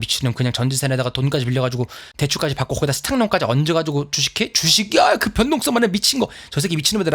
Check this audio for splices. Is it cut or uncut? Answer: cut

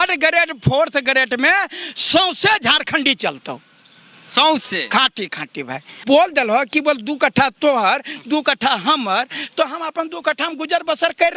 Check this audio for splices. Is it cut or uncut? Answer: cut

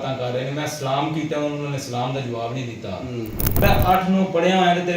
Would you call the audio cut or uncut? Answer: cut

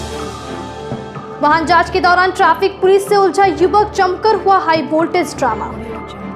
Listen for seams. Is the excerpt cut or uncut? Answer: uncut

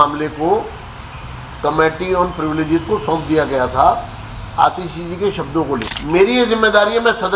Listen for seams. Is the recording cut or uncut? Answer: cut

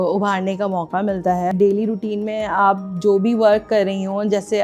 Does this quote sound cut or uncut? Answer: cut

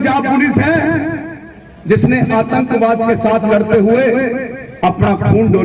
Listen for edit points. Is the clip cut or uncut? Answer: uncut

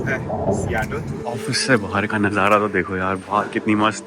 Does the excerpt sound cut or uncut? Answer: cut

